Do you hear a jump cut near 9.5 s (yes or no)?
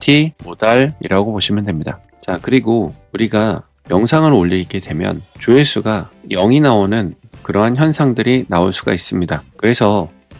no